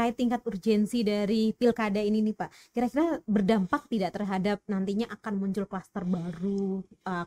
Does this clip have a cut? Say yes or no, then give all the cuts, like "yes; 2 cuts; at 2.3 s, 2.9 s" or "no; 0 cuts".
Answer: no; 0 cuts